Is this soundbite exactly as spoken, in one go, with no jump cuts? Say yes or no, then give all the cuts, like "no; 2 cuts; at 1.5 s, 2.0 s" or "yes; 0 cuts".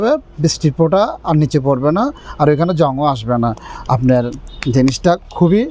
yes; 0 cuts